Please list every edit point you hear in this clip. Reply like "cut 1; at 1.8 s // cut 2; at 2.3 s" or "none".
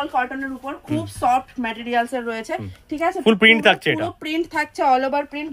none